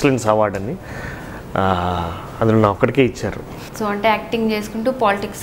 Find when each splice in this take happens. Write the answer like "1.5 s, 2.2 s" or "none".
3.6 s